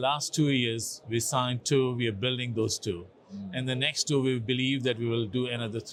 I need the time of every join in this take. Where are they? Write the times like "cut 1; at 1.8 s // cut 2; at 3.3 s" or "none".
none